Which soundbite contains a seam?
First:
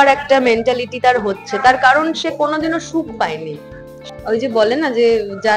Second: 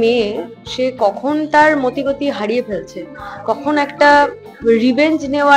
first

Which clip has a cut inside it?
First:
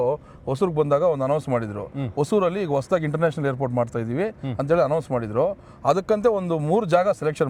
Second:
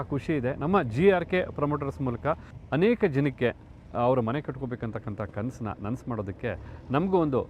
second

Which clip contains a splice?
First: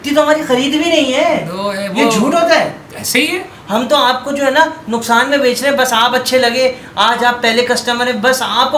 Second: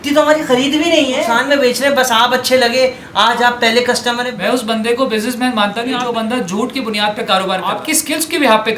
second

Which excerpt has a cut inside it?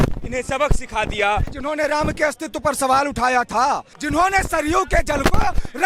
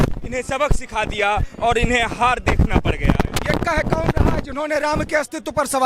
first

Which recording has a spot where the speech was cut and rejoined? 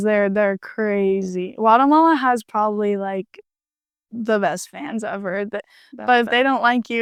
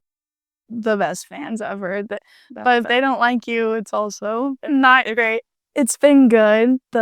second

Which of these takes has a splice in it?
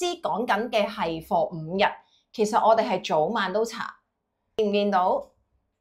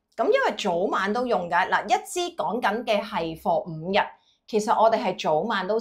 first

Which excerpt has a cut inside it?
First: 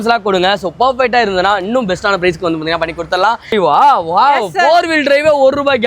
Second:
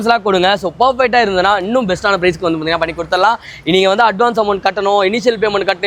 first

